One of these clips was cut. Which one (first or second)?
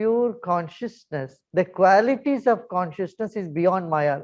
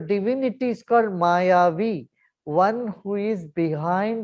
first